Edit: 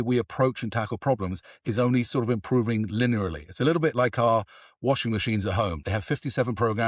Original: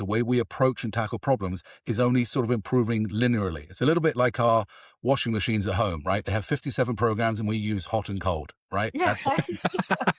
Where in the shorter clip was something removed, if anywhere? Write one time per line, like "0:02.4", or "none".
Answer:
0:05.8